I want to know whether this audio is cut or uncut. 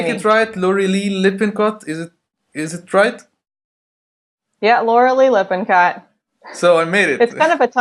uncut